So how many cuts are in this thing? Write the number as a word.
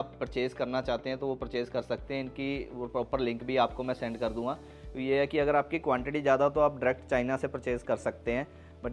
zero